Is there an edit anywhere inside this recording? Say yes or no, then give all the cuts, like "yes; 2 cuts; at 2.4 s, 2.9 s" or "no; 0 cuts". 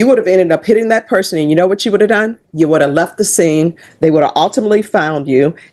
no; 0 cuts